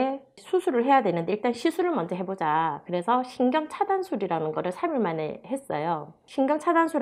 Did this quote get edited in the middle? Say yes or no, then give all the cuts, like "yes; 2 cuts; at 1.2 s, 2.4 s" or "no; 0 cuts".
no; 0 cuts